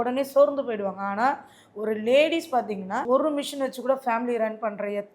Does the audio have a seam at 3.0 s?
yes; 1 cut; at 3.0 s

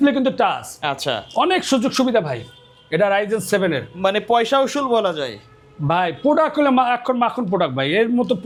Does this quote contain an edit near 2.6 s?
no; 0 cuts

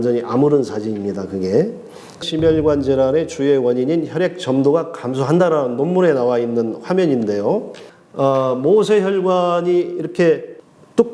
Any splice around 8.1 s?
no; 1 cut; at 2.2 s

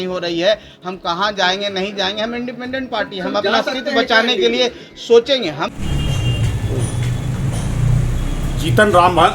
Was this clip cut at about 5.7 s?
yes; 1 cut; at 5.7 s

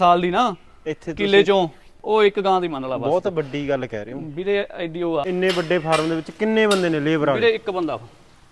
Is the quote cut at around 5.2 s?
yes; 1 cut; at 5.2 s

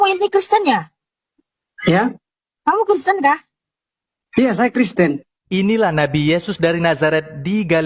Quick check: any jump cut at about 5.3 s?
yes; 1 cut; at 5.3 s

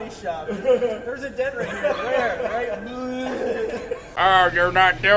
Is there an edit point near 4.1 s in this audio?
yes; 1 cut; at 4.1 s

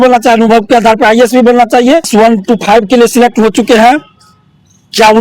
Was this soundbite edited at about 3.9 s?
no; 1 cut; at 2.1 s

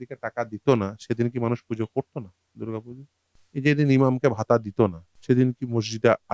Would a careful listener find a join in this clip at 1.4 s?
no; 2 cuts; at 3.4 s, 5.1 s

